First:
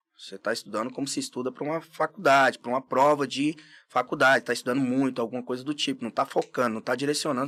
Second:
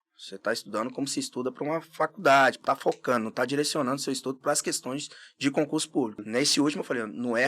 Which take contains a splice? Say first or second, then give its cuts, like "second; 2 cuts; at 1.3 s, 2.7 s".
second; 2 cuts; at 2.6 s, 6.2 s